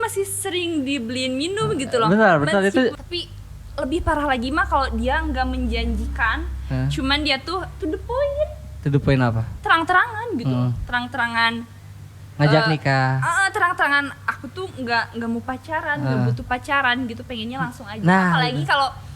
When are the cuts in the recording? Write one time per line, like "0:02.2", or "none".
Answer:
0:03.0